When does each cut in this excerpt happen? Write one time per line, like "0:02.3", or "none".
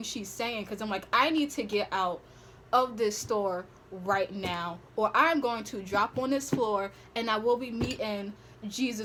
none